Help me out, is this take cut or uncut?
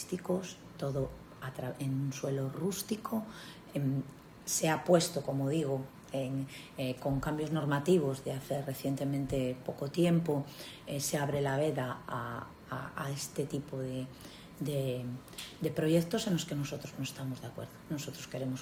uncut